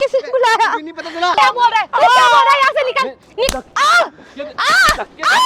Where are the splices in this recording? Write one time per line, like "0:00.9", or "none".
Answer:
0:01.3